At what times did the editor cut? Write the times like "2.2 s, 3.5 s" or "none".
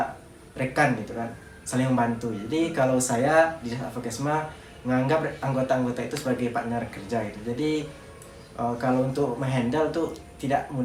none